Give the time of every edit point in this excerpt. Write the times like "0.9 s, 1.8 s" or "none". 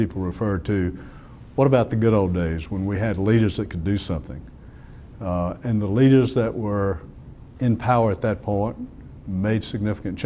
1.0 s